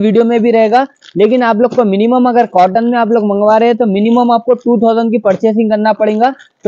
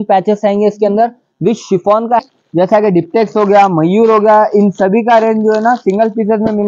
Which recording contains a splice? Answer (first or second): second